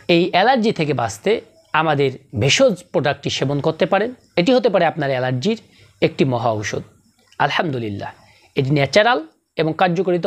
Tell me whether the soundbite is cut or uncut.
cut